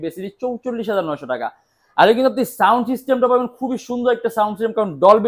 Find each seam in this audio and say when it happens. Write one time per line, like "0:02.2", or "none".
none